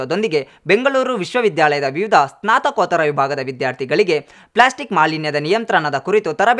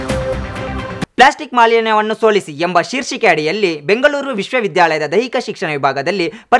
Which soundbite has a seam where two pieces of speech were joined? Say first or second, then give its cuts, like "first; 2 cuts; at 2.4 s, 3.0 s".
second; 1 cut; at 1.1 s